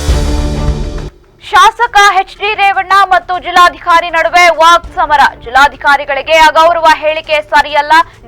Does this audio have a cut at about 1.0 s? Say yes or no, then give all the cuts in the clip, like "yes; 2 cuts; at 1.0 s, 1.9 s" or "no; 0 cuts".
yes; 1 cut; at 1.0 s